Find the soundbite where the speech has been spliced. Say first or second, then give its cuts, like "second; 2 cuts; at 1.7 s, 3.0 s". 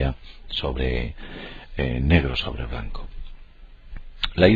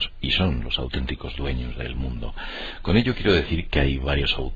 second; 1 cut; at 1.7 s